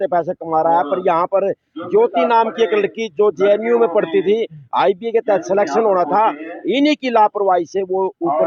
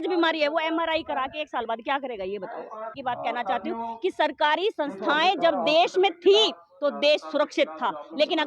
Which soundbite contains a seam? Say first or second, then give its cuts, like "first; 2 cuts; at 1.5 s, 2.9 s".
second; 1 cut; at 3.0 s